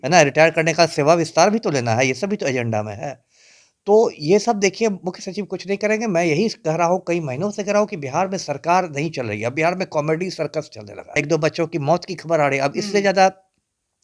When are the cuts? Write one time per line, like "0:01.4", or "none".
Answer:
0:11.2